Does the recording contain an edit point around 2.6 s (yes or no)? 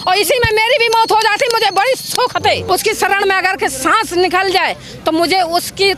yes